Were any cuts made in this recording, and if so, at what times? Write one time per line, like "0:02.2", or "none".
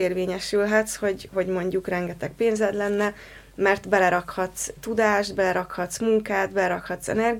0:04.7